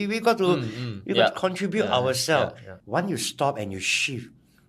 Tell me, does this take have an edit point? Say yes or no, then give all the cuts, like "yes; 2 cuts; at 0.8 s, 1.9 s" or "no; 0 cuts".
yes; 1 cut; at 2.7 s